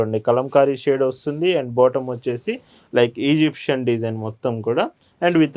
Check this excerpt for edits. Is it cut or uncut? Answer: uncut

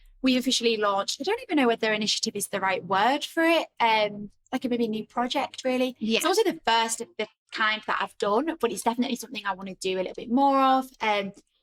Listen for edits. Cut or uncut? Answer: uncut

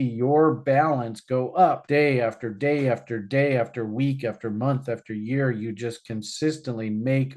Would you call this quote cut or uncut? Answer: uncut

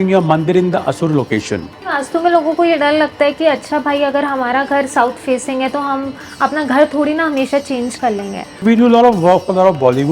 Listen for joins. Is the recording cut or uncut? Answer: cut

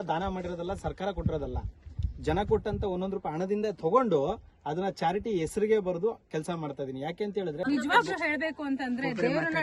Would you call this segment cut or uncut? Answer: cut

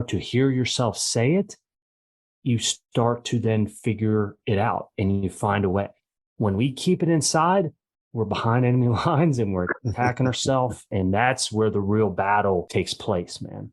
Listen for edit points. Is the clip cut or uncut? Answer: cut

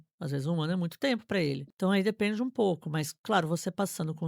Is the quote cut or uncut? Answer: cut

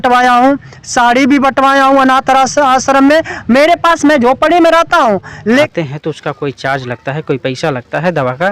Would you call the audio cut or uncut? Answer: cut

